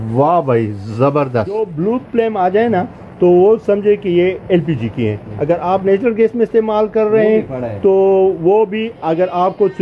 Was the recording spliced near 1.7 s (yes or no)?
yes